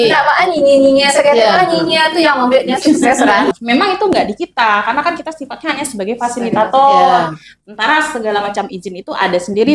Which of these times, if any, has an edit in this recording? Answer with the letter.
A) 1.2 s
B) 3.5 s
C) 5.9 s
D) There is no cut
B